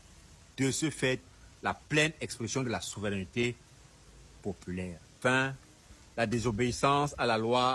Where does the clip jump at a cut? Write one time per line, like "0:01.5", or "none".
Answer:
0:05.1